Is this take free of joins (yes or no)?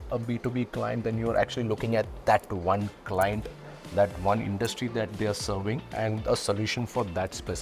yes